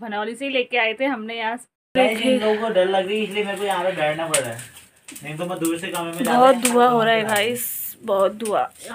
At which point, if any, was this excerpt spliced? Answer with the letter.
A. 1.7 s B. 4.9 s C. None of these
A